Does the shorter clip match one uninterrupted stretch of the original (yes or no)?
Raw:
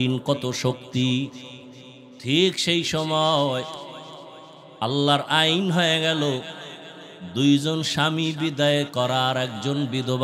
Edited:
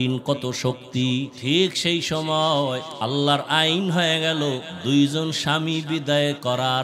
no